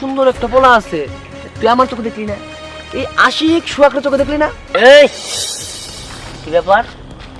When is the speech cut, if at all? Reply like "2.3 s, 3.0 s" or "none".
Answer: 4.7 s